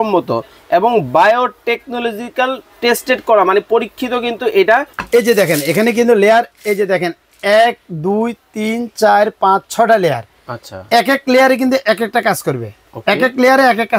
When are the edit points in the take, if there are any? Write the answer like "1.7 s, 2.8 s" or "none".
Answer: 5.0 s